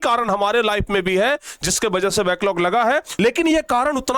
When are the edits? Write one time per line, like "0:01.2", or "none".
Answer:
0:03.1

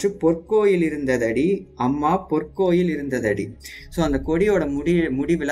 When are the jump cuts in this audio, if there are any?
none

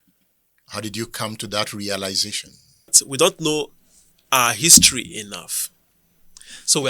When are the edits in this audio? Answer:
0:03.0

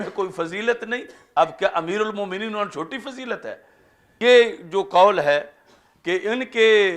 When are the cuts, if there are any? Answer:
0:04.1

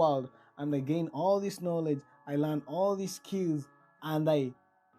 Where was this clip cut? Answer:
none

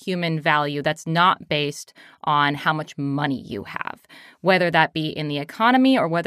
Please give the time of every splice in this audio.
none

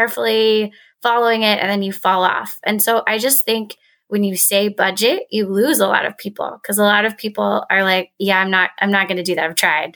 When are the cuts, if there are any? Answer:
none

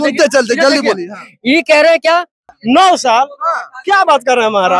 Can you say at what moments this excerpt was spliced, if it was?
0:02.5

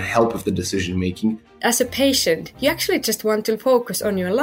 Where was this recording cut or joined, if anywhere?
0:01.5
0:02.5

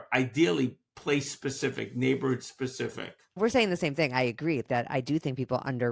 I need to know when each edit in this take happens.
0:03.3

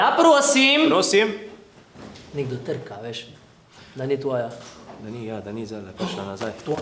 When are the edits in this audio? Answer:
none

